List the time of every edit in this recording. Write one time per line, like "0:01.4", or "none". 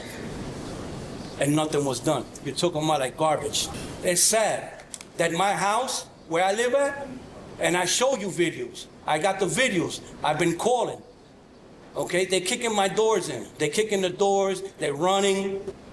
0:03.7